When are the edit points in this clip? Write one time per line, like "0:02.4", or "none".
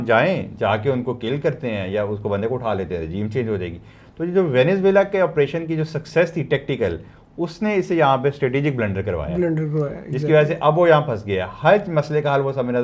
none